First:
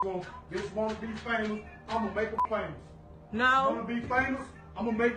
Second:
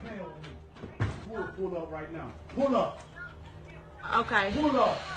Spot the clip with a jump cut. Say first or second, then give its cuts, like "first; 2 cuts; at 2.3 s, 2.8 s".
first; 1 cut; at 2.4 s